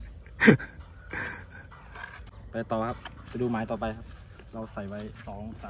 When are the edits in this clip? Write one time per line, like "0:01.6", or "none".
0:02.4